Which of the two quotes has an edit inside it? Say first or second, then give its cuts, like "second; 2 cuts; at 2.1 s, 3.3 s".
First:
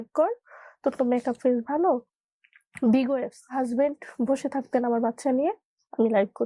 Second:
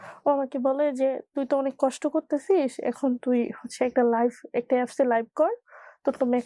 first; 2 cuts; at 2.2 s, 3.4 s